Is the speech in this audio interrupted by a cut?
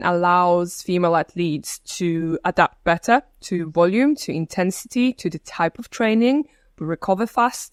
no; 0 cuts

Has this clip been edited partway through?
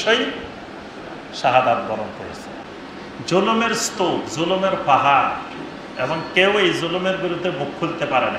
yes; 1 cut; at 2.6 s

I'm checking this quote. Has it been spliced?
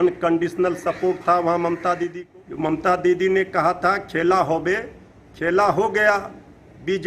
yes; 1 cut; at 2.1 s

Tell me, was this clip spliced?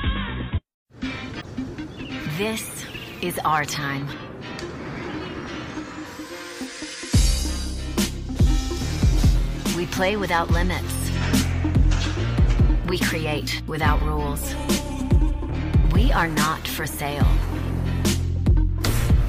yes; 1 cut; at 1.4 s

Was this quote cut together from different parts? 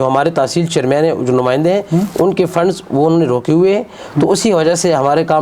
no; 0 cuts

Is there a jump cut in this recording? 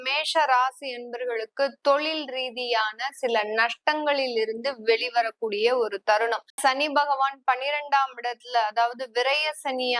yes; 1 cut; at 6.6 s

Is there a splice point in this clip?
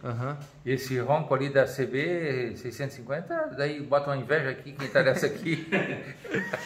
no; 0 cuts

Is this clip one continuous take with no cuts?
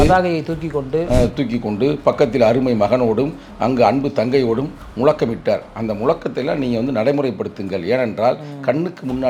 yes; 0 cuts

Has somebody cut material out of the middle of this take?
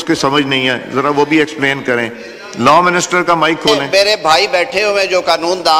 no; 0 cuts

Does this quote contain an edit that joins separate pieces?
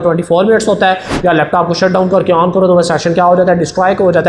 no; 0 cuts

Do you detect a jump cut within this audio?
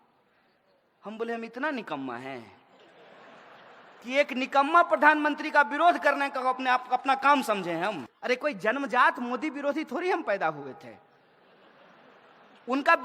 yes; 1 cut; at 8.1 s

